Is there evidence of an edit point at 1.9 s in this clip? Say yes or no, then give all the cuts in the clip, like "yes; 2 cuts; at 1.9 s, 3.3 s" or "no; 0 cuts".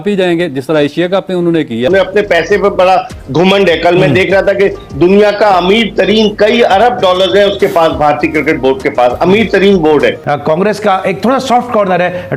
yes; 2 cuts; at 1.9 s, 10.2 s